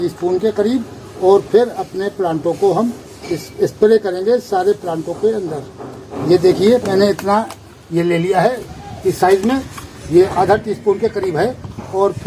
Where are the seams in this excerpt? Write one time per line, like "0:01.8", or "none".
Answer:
0:06.1
0:08.6